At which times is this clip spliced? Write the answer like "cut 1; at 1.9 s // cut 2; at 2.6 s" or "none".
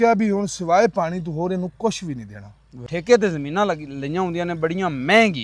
cut 1; at 2.9 s